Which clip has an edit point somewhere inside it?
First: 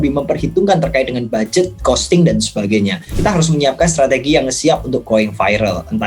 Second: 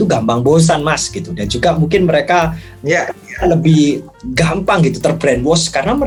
first; 1 cut; at 3.1 s

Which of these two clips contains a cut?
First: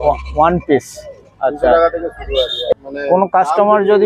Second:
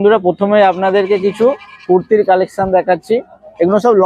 first; 1 cut; at 2.7 s

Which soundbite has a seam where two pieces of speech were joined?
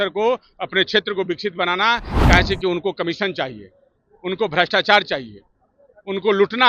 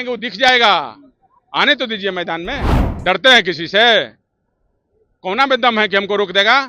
second; 1 cut; at 2.6 s

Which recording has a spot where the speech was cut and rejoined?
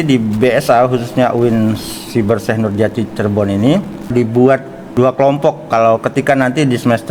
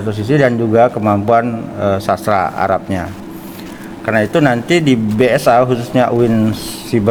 first; 2 cuts; at 4.1 s, 4.8 s

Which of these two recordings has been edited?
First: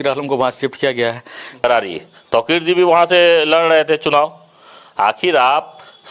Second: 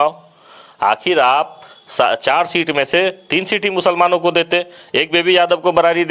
first; 1 cut; at 1.6 s

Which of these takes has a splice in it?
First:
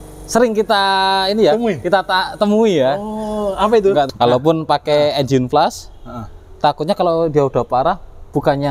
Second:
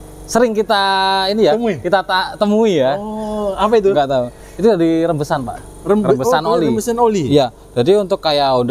first; 1 cut; at 4.1 s

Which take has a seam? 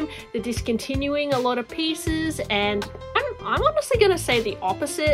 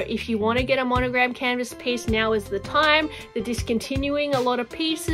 first; 1 cut; at 3.2 s

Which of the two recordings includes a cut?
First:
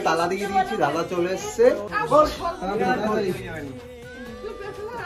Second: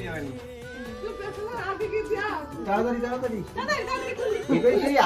first; 1 cut; at 1.9 s

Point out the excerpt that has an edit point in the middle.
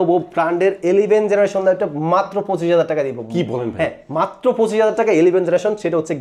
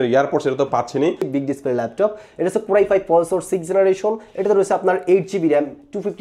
second; 1 cut; at 1.2 s

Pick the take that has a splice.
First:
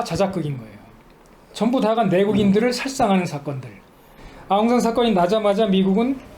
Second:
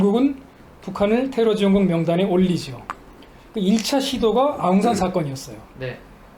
first; 1 cut; at 4.3 s

